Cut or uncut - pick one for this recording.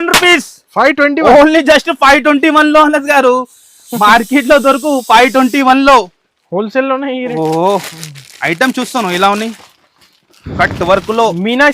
cut